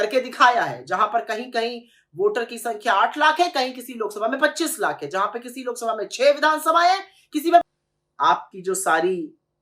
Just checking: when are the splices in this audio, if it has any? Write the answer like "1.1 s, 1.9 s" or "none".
7.6 s

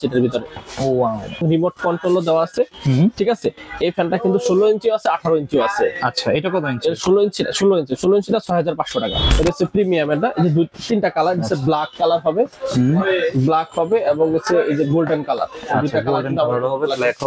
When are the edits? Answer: 1.4 s, 9.3 s

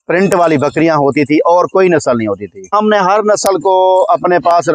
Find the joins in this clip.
2.7 s

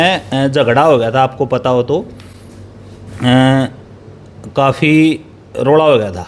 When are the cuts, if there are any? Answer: none

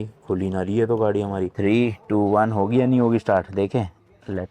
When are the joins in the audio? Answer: 1.5 s

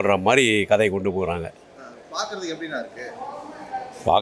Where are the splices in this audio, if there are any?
none

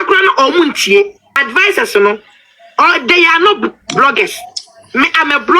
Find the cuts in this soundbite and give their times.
1.4 s

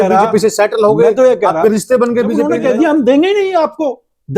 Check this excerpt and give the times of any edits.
2.5 s

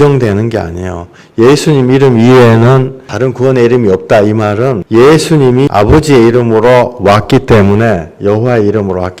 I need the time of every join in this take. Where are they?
4.8 s, 5.7 s

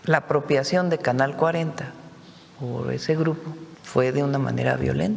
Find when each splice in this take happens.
3.7 s

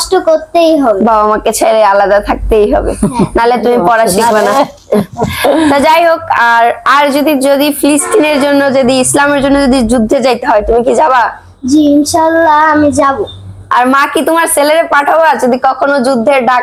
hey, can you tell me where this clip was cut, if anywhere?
none

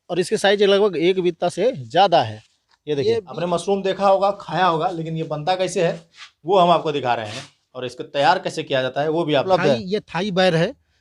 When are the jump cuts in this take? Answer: 3.3 s, 9.5 s

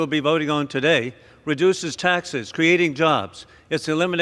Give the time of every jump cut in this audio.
none

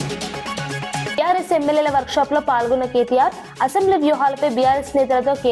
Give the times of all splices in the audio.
none

